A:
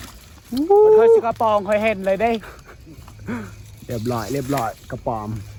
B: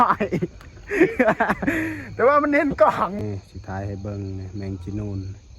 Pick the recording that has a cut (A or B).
B